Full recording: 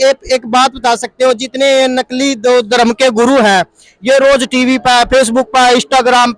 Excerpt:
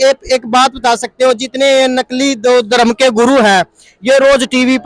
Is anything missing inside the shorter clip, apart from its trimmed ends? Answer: no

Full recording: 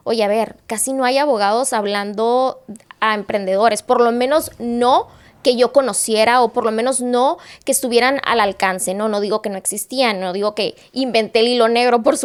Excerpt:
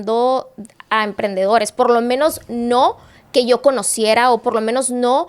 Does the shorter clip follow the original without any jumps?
yes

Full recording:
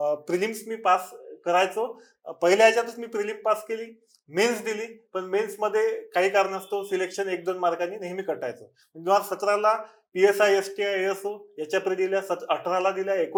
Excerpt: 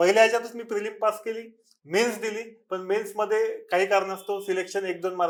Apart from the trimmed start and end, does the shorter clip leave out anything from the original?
no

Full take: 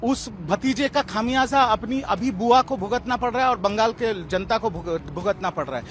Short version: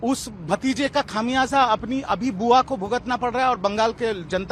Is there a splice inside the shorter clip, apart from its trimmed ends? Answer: no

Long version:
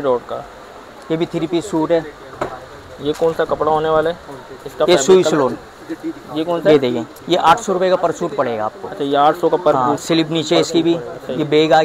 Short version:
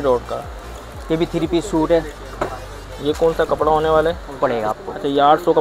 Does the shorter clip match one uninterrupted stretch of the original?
no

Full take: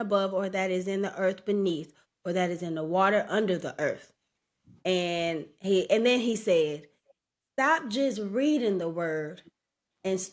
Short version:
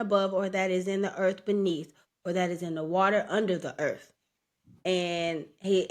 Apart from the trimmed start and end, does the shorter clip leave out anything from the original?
no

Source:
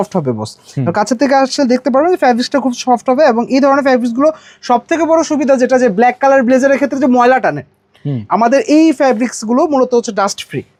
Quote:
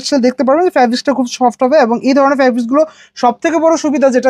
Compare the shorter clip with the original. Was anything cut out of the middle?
no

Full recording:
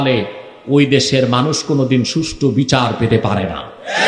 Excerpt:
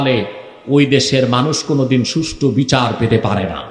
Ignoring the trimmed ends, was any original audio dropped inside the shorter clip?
no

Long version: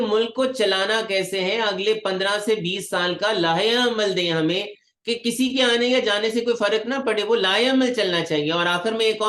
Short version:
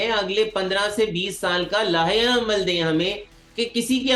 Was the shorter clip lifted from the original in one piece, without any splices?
yes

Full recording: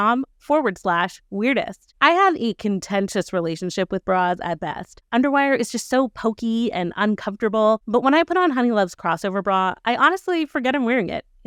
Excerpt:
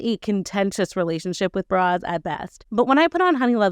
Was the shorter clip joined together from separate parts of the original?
yes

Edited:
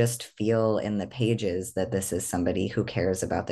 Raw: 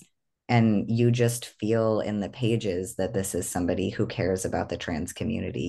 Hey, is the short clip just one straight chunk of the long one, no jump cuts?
yes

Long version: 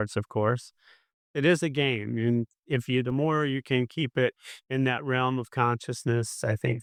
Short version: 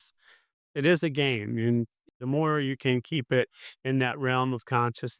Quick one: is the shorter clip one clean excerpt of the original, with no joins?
no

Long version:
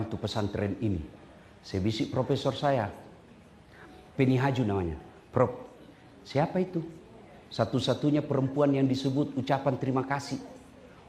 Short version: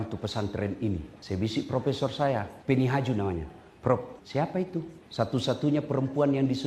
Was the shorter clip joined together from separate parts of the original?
yes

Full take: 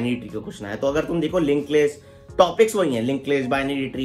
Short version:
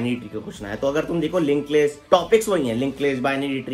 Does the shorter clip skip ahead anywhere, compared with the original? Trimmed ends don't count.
yes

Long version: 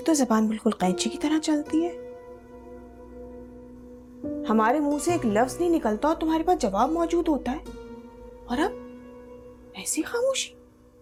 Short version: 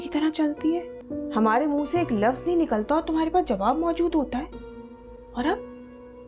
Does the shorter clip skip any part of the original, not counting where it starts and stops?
yes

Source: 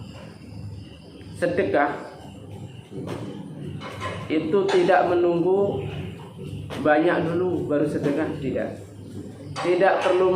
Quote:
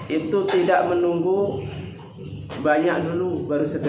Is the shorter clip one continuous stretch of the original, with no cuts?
yes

